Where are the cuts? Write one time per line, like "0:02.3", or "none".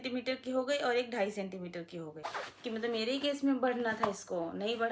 0:02.2